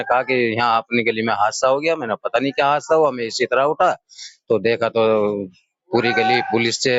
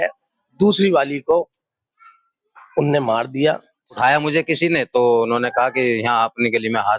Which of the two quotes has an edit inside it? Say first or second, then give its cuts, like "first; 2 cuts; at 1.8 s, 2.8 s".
second; 1 cut; at 4.0 s